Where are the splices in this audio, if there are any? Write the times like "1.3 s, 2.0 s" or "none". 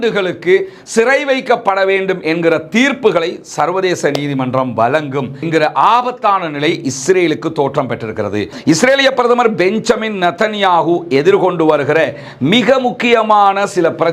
8.5 s